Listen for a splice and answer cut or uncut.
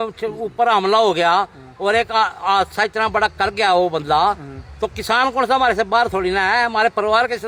uncut